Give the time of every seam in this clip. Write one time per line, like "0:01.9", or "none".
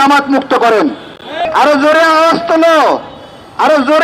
0:01.4